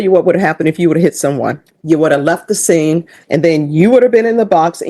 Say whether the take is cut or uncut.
cut